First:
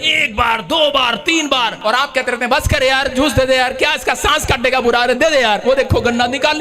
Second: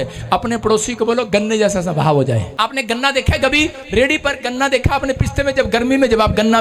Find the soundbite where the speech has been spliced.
first; 1 cut; at 1.7 s

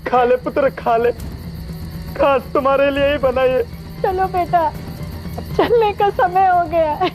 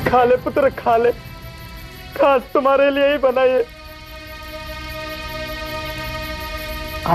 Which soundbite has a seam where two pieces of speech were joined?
first; 1 cut; at 3.8 s

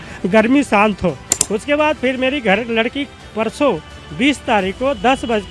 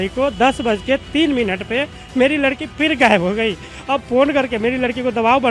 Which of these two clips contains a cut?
first; 1 cut; at 1.3 s

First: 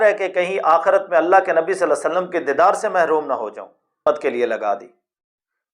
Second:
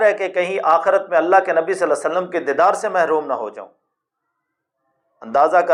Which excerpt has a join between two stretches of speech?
first; 1 cut; at 4.0 s

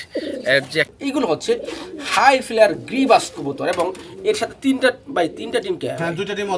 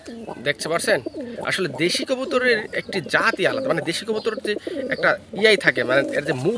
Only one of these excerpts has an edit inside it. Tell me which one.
first; 1 cut; at 0.9 s

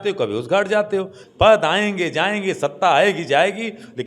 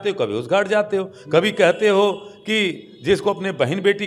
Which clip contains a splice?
first; 1 cut; at 1.2 s

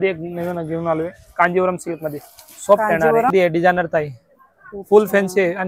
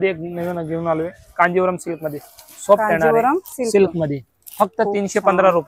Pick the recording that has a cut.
first; 1 cut; at 3.3 s

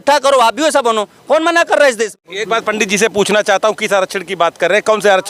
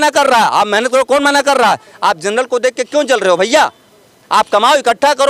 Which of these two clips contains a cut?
first; 1 cut; at 2.1 s

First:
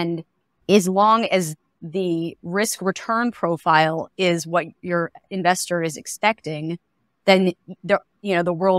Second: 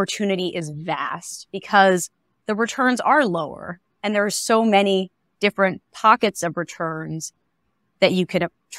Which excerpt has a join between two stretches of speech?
first; 2 cuts; at 1.8 s, 4.8 s

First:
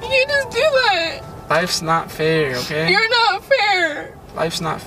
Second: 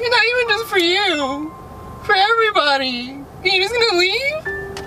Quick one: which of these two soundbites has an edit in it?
first; 1 cut; at 1.4 s

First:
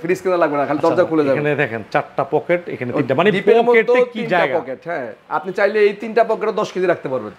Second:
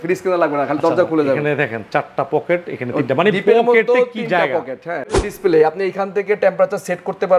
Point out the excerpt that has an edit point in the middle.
second; 1 cut; at 5.3 s

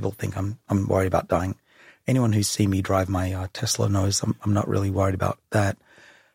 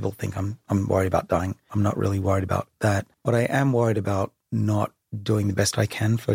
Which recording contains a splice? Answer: second; 2 cuts; at 1.7 s, 3.1 s

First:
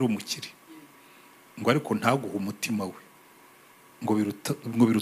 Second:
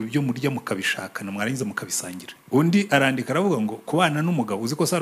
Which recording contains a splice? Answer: second; 1 cut; at 2.3 s

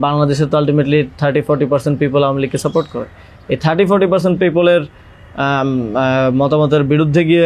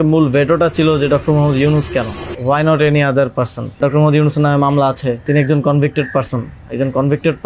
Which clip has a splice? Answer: second; 3 cuts; at 2.2 s, 3.8 s, 5.2 s

